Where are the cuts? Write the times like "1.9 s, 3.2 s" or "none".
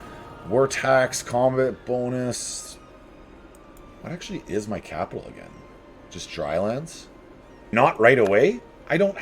7.7 s